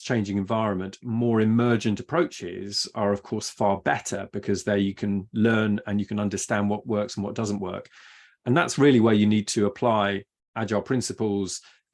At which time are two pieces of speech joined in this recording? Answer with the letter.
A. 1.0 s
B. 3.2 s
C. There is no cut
C